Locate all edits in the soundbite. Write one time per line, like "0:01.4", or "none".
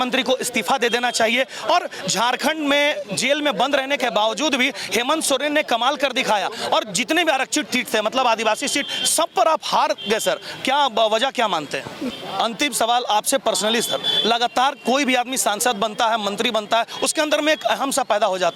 0:12.0